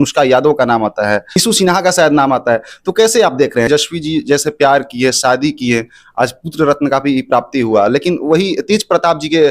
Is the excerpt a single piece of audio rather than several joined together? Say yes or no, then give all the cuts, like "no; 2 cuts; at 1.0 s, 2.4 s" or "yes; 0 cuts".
no; 2 cuts; at 1.4 s, 3.7 s